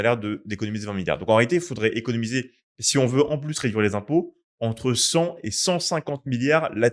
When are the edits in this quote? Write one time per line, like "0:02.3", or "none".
none